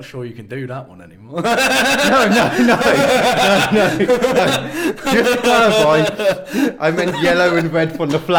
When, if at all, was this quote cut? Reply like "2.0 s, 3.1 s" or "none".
4.4 s